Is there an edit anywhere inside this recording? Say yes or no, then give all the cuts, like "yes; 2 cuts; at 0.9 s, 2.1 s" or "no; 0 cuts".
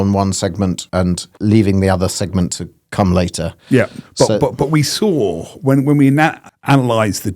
yes; 2 cuts; at 1.2 s, 6.5 s